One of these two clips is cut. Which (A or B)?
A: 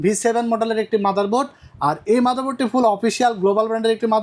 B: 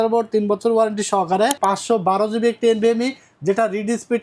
B